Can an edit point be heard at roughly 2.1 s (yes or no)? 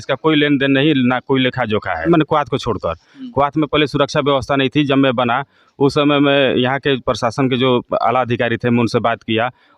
yes